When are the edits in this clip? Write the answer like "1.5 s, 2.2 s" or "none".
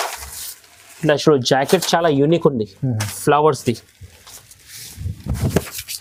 none